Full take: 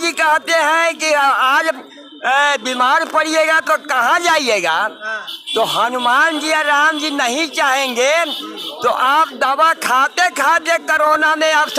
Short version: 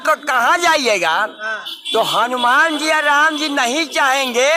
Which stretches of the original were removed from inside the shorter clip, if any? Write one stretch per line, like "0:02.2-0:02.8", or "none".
none